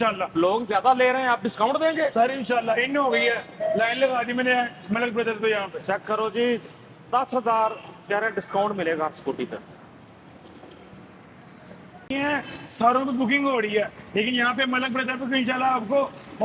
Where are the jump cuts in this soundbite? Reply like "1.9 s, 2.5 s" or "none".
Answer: 12.1 s